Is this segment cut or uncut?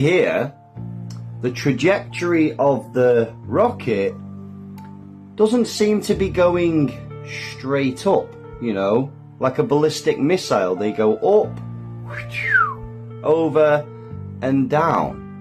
uncut